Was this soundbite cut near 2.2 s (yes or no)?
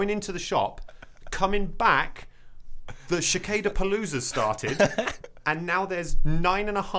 no